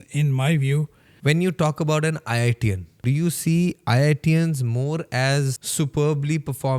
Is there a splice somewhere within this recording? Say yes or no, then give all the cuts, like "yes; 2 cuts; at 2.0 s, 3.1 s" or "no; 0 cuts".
yes; 3 cuts; at 1.0 s, 3.0 s, 5.6 s